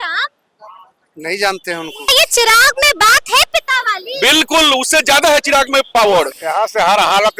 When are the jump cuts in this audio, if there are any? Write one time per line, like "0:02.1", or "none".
0:02.1
0:06.4